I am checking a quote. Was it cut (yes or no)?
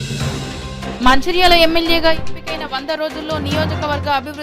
yes